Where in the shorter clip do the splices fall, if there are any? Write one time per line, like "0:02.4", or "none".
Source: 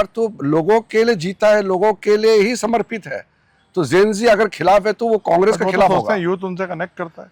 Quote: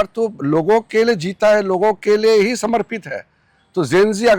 none

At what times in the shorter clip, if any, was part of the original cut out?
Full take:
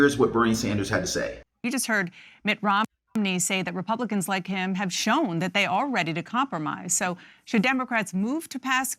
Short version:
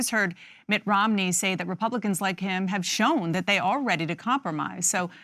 0:01.1

